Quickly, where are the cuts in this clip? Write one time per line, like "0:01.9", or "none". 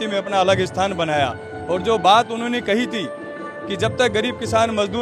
none